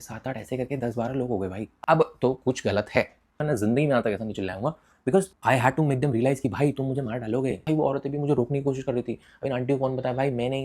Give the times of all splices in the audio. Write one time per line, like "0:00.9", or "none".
0:01.6
0:03.4
0:07.6